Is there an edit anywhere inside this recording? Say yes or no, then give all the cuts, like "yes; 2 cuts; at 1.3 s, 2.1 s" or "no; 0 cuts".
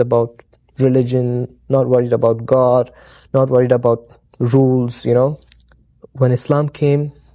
yes; 1 cut; at 5.4 s